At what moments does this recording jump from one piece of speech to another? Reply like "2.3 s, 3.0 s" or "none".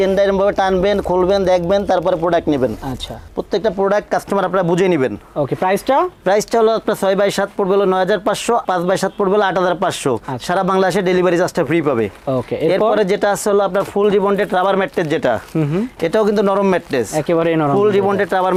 none